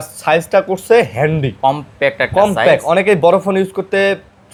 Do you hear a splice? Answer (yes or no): no